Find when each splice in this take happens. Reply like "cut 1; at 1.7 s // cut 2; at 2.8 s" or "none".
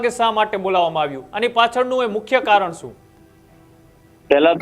none